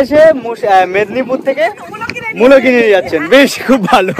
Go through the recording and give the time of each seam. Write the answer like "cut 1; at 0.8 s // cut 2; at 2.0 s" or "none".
none